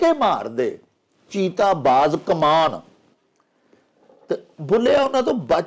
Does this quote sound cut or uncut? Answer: uncut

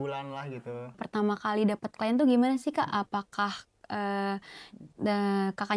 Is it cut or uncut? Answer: cut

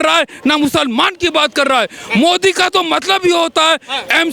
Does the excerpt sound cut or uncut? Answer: uncut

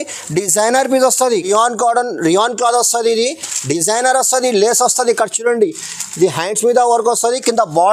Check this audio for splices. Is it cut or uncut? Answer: cut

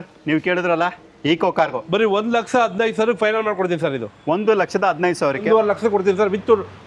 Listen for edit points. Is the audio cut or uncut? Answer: cut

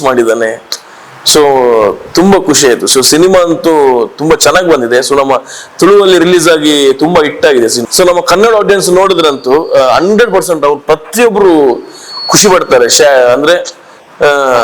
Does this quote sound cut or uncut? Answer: cut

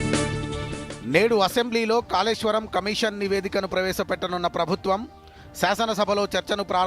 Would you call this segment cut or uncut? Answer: uncut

